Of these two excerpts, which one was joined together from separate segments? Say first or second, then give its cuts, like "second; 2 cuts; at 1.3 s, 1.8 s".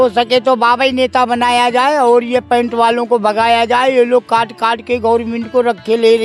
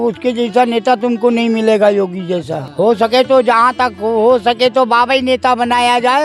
second; 1 cut; at 2.6 s